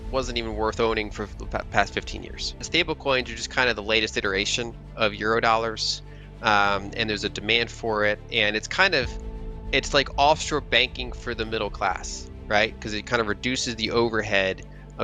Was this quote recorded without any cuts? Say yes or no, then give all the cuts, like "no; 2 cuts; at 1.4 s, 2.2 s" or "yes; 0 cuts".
no; 1 cut; at 2.6 s